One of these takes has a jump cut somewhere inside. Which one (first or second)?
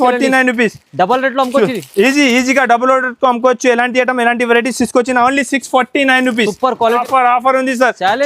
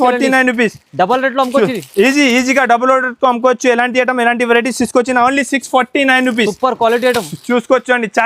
first